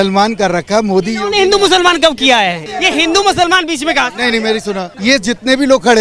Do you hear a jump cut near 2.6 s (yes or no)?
yes